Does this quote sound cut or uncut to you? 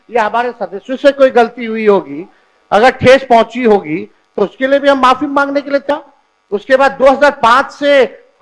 cut